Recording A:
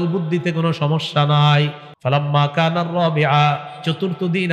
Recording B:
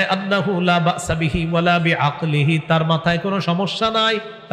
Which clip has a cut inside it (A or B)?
A